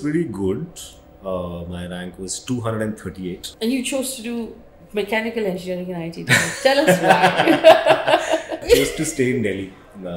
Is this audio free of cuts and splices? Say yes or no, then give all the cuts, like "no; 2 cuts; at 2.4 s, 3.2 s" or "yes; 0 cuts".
no; 2 cuts; at 3.5 s, 8.6 s